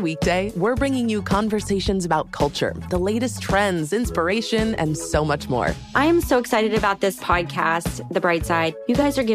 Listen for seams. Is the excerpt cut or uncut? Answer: uncut